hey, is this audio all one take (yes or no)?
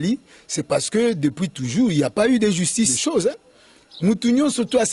no